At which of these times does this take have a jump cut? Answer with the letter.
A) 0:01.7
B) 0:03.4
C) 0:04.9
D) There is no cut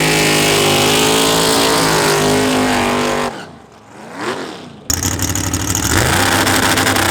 C